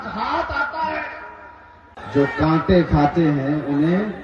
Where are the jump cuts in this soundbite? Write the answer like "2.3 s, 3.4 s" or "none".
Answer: 1.9 s